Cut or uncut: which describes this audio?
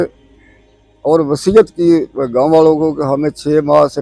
uncut